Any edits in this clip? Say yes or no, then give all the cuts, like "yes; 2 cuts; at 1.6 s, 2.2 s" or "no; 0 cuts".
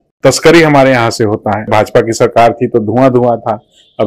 yes; 1 cut; at 1.7 s